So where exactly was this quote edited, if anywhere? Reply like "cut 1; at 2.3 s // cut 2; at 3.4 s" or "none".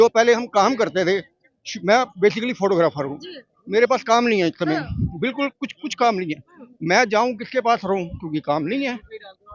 none

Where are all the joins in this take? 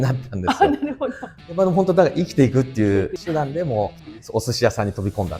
cut 1; at 1.3 s // cut 2; at 3.2 s

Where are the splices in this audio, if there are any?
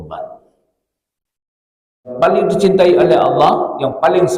cut 1; at 2.2 s

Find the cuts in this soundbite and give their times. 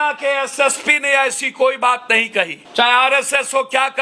cut 1; at 2.3 s

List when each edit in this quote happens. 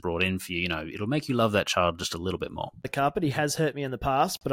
cut 1; at 2.8 s

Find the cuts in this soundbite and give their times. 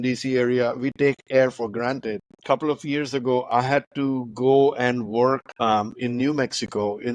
cut 1; at 2.3 s // cut 2; at 5.5 s

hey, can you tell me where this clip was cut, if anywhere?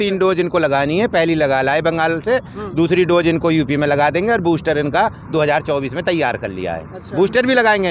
none

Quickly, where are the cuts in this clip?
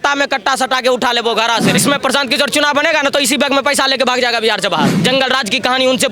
cut 1; at 1.8 s // cut 2; at 4.9 s

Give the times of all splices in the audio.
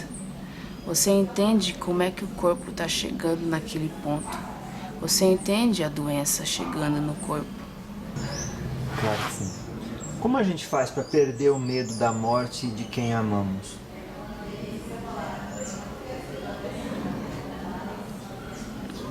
cut 1; at 8.1 s

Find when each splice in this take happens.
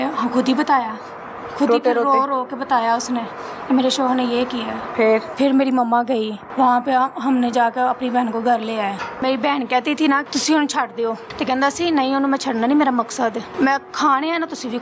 cut 1; at 5.3 s // cut 2; at 6.4 s // cut 3; at 9.2 s // cut 4; at 10.3 s // cut 5; at 11.3 s // cut 6; at 13.5 s

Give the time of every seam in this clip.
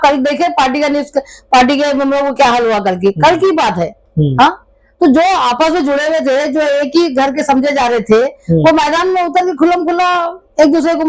none

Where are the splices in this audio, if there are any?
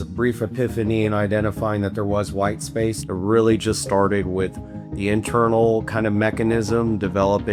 none

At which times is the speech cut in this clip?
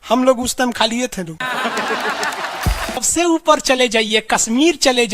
cut 1; at 3.0 s

